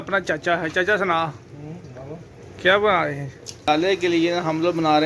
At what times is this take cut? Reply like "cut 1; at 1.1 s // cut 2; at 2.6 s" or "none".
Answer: cut 1; at 3.7 s